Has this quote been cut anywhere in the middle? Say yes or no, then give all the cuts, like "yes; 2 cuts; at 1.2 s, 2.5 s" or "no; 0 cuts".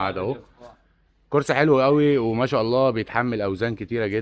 no; 0 cuts